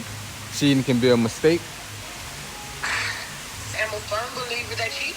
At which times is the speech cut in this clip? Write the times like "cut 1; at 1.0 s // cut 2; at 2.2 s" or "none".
cut 1; at 2.0 s // cut 2; at 3.8 s